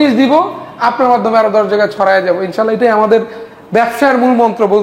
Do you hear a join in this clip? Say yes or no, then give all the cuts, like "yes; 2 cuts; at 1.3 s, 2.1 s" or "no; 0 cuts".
no; 0 cuts